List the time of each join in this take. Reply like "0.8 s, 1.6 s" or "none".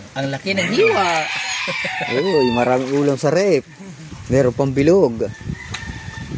none